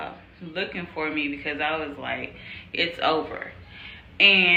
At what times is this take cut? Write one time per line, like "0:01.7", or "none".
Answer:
none